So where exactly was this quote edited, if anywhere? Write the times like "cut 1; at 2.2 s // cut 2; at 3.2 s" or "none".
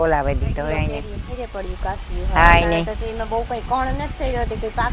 none

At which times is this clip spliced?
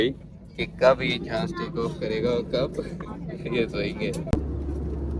cut 1; at 4.3 s

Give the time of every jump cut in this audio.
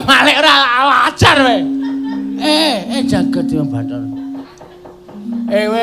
cut 1; at 4.5 s

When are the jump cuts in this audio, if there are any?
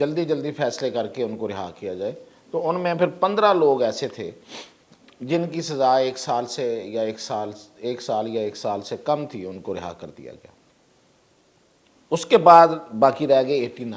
none

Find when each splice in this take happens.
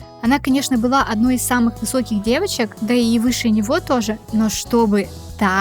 none

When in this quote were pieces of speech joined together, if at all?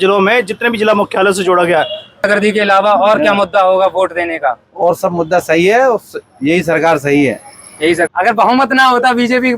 cut 1; at 2.3 s // cut 2; at 8.1 s

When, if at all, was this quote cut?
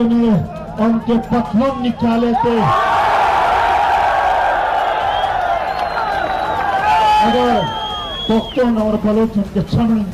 none

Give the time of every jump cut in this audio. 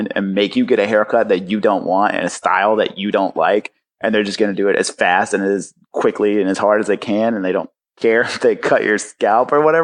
none

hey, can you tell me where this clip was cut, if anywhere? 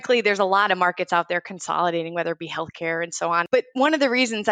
cut 1; at 3.5 s

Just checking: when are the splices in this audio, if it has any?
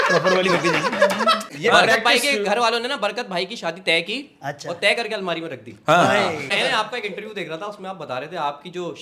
cut 1; at 1.5 s // cut 2; at 6.5 s

